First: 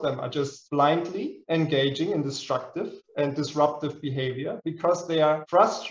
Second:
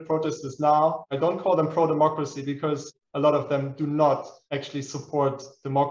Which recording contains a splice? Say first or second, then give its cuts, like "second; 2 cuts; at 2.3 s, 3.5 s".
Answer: second; 3 cuts; at 1.0 s, 2.9 s, 4.4 s